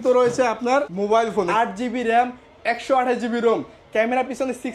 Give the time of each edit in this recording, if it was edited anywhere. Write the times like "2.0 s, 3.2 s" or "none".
1.5 s